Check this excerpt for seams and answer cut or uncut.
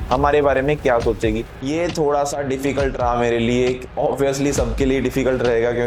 cut